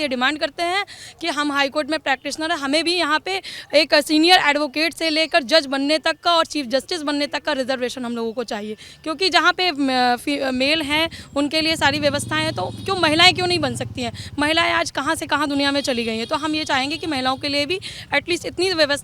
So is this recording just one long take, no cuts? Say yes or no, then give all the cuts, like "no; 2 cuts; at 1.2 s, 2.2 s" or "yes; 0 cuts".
yes; 0 cuts